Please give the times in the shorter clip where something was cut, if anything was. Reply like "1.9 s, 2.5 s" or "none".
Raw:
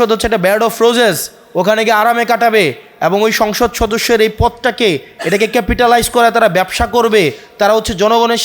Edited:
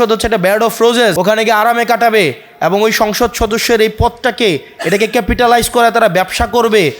1.2 s